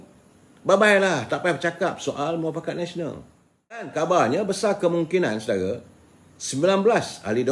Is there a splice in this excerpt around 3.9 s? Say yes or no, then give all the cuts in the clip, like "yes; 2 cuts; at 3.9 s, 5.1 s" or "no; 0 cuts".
yes; 1 cut; at 3.9 s